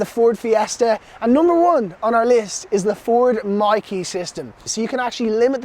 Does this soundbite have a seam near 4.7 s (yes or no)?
yes